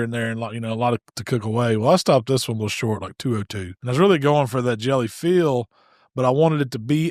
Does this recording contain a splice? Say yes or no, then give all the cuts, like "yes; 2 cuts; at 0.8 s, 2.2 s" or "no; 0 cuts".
yes; 1 cut; at 3.7 s